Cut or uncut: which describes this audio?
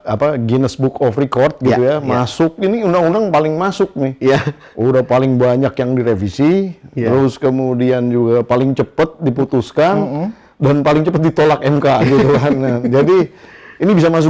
uncut